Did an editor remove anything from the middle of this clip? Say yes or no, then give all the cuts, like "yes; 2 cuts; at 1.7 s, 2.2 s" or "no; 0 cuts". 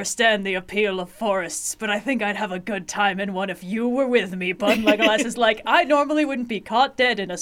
no; 0 cuts